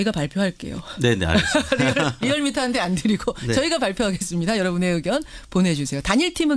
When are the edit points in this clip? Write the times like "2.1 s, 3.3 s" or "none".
4.6 s